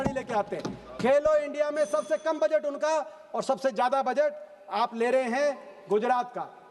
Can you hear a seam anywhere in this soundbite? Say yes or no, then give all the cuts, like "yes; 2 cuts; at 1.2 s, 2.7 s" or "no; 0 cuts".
no; 0 cuts